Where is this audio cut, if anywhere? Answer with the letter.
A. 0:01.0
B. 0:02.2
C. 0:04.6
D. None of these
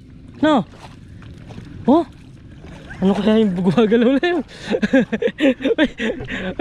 D